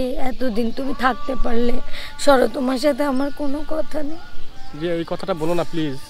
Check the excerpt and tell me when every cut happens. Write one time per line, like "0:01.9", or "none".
none